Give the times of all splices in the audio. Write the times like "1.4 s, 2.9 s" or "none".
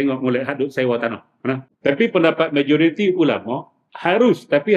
1.7 s